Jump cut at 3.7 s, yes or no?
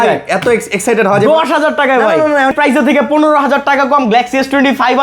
no